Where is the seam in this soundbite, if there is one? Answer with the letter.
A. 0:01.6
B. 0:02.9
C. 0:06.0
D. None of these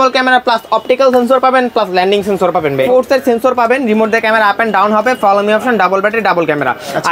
B